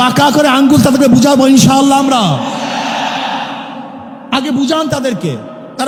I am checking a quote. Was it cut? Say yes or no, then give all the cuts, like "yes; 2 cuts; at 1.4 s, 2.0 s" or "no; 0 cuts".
no; 0 cuts